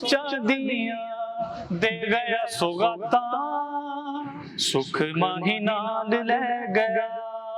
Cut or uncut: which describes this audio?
uncut